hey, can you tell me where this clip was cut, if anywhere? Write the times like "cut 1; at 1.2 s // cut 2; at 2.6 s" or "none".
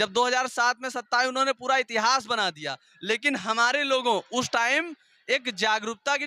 none